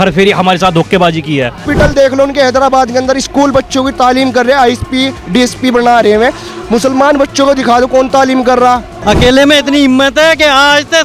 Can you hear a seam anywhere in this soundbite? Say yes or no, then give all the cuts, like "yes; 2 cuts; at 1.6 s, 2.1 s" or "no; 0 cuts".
yes; 2 cuts; at 1.7 s, 8.9 s